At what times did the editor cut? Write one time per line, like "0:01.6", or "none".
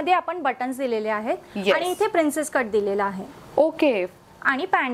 none